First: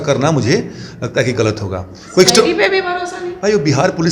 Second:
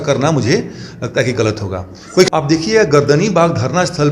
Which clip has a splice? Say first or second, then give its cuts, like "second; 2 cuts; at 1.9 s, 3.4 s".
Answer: second; 1 cut; at 2.3 s